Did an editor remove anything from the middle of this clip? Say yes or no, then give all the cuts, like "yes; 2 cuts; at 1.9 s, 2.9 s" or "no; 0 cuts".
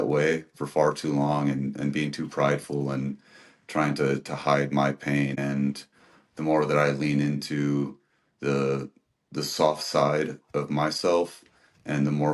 yes; 1 cut; at 5.3 s